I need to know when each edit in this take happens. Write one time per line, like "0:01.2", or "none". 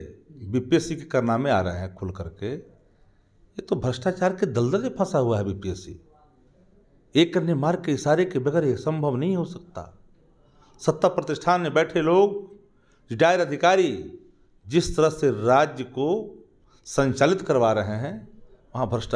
none